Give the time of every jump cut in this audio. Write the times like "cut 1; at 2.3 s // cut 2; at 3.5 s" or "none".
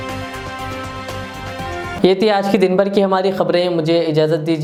none